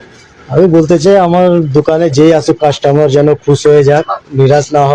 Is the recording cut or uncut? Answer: uncut